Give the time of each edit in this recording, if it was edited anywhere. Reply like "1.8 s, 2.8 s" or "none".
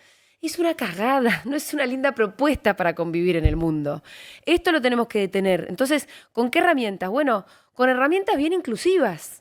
none